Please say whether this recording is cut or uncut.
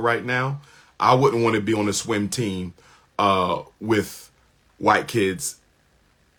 uncut